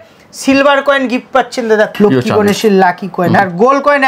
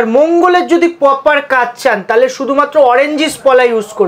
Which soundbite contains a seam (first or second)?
first